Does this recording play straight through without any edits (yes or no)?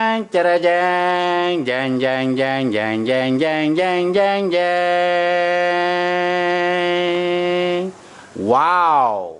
yes